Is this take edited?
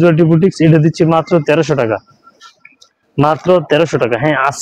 no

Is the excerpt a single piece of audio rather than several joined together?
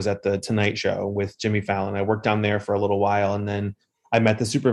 yes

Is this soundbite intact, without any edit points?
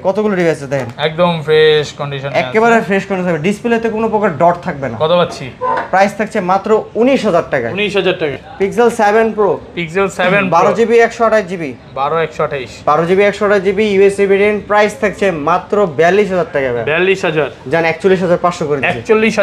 no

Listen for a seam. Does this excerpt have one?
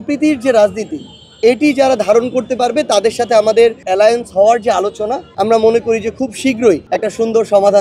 yes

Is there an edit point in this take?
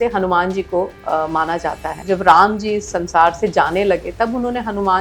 yes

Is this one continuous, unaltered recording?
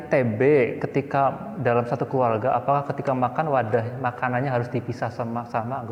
yes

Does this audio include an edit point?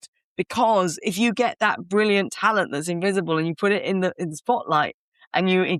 no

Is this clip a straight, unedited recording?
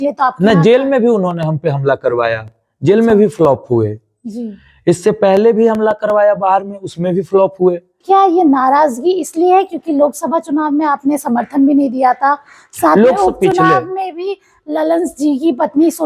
no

